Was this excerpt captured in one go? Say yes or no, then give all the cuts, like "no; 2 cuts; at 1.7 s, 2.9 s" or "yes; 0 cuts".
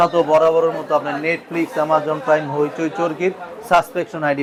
yes; 0 cuts